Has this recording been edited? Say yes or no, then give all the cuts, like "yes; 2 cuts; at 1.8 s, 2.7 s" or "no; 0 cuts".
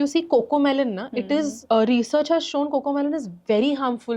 yes; 1 cut; at 1.6 s